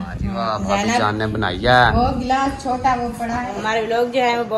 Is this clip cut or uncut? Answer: cut